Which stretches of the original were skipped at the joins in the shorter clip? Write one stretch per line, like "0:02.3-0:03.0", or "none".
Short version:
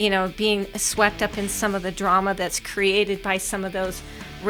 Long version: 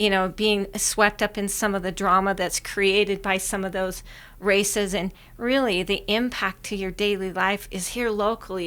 none